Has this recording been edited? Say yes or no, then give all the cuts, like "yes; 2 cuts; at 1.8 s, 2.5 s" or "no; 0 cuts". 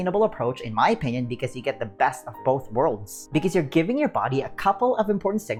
no; 0 cuts